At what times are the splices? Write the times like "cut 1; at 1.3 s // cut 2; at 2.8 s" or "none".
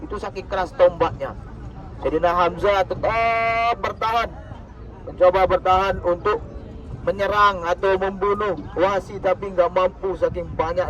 none